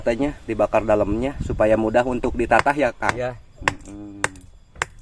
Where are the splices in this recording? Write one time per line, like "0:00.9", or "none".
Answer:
none